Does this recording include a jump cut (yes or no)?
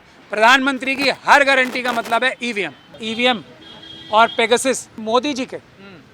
yes